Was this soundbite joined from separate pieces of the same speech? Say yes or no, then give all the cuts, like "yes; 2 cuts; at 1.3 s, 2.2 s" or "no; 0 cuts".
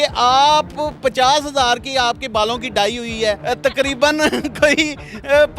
yes; 1 cut; at 3.4 s